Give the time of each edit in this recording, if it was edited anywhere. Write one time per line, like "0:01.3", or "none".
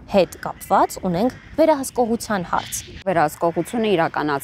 0:03.0